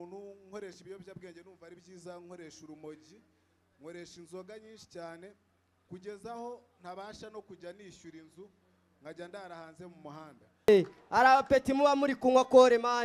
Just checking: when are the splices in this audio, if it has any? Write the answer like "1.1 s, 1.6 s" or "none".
10.7 s

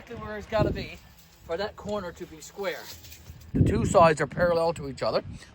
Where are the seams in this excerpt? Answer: 3.5 s

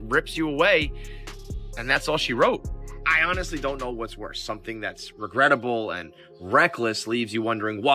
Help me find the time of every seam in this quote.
none

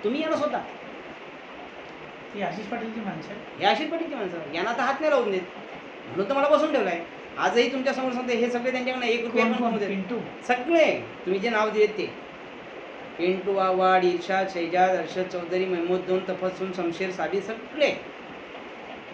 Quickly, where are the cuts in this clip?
none

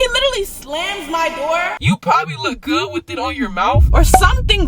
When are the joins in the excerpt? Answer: 1.8 s

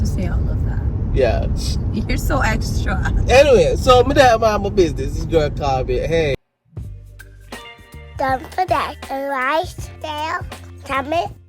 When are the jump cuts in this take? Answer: 6.5 s

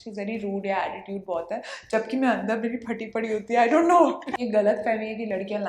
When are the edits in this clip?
4.4 s

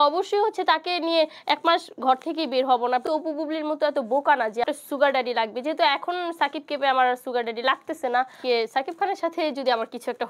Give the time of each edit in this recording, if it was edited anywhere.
3.0 s, 4.7 s, 8.4 s

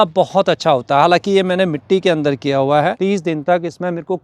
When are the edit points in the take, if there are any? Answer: 3.0 s

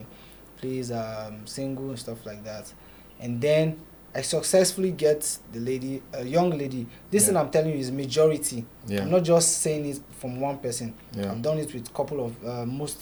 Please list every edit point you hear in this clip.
none

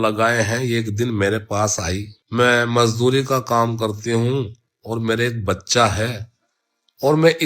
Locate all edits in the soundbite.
2.1 s

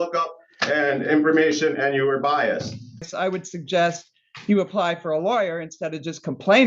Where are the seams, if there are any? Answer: 3.1 s

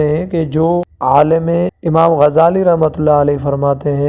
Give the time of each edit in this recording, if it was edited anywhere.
0.9 s, 1.8 s

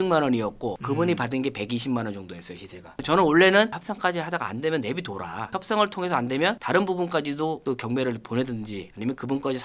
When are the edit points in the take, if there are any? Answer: none

